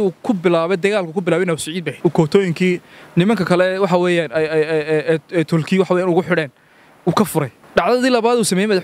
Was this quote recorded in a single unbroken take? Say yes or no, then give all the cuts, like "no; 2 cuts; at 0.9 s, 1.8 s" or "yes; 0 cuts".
no; 2 cuts; at 1.9 s, 7.6 s